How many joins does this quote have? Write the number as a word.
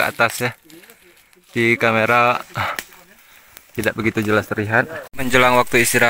one